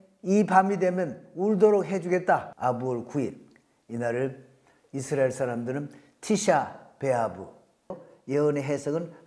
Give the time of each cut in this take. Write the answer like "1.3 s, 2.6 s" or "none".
2.5 s, 8.1 s